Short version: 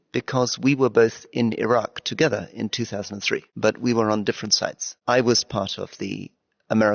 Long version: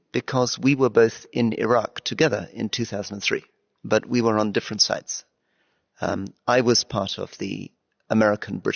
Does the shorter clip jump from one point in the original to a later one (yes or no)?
yes